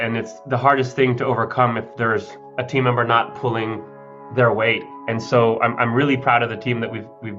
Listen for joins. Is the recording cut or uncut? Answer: uncut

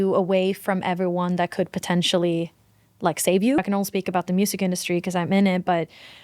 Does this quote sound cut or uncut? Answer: cut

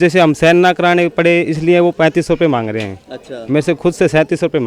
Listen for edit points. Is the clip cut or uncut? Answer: uncut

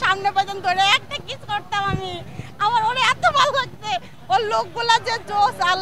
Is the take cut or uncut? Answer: uncut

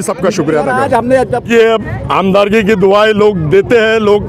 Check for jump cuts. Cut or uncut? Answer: cut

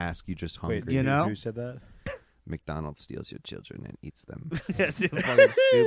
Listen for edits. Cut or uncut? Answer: cut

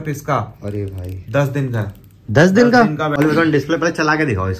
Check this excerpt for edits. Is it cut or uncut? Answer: cut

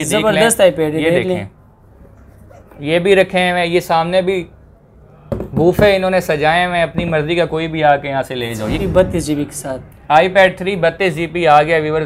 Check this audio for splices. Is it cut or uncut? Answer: cut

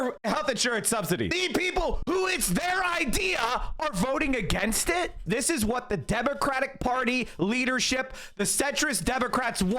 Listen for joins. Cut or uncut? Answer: cut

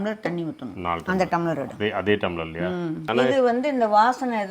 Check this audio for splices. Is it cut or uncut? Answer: cut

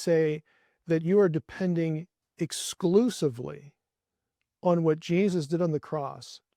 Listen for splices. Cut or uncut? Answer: uncut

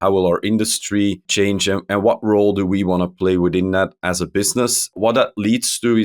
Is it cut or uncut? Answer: cut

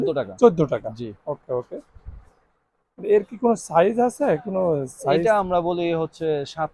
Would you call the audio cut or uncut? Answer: uncut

